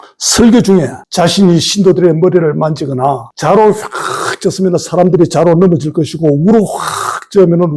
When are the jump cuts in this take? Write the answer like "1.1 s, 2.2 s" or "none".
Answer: 1.0 s, 3.3 s